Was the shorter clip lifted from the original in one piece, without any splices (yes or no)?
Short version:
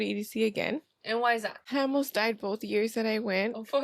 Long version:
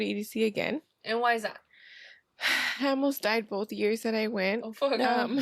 no